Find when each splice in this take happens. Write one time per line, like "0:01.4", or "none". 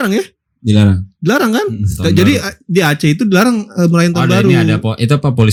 none